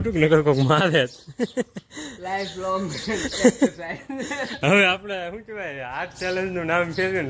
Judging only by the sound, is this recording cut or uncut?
uncut